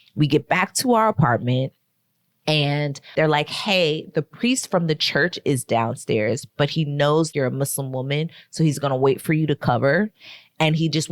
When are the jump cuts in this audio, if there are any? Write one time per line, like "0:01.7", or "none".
0:03.0